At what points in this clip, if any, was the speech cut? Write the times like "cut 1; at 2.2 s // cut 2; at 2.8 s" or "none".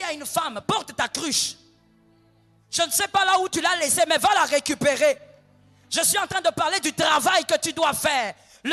none